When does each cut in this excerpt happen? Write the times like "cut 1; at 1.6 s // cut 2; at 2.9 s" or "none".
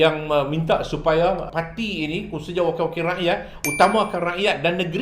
cut 1; at 1.5 s